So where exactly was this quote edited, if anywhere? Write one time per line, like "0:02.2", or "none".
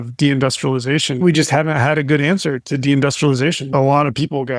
0:01.2
0:03.6